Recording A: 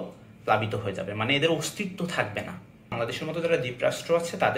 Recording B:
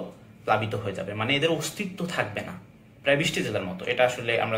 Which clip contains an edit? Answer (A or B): A